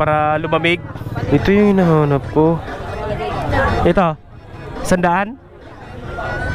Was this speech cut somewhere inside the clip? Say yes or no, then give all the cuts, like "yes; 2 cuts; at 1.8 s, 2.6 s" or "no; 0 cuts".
yes; 2 cuts; at 1.2 s, 3.5 s